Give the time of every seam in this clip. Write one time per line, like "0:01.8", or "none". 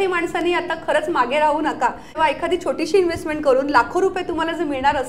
0:02.1